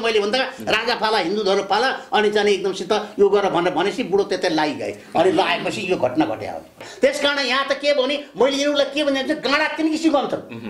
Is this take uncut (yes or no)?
no